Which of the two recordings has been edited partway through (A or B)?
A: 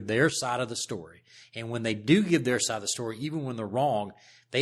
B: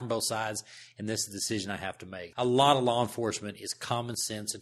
B